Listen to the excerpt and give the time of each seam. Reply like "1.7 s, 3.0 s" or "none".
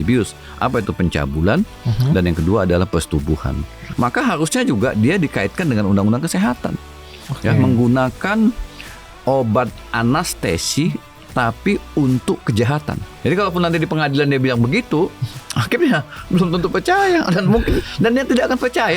3.9 s, 13.0 s